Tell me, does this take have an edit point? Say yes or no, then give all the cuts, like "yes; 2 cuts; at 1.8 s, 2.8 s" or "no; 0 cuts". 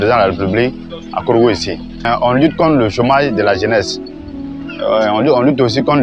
yes; 1 cut; at 2.0 s